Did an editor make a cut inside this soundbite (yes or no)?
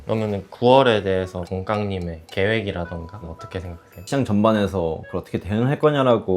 yes